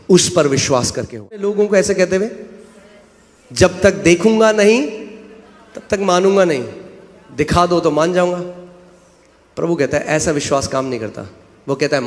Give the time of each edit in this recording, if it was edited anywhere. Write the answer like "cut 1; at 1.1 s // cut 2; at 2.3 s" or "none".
cut 1; at 1.5 s